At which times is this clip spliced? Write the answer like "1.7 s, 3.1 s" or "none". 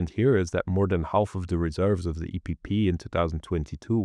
none